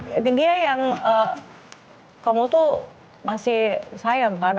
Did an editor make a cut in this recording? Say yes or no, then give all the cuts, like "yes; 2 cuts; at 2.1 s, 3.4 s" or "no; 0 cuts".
no; 0 cuts